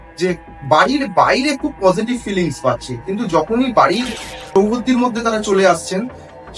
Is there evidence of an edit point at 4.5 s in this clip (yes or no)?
yes